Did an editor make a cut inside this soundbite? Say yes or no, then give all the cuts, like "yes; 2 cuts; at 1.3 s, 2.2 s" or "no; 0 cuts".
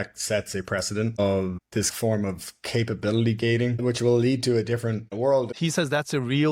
yes; 3 cuts; at 1.9 s, 3.8 s, 5.5 s